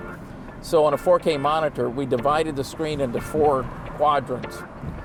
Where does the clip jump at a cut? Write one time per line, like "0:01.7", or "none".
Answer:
none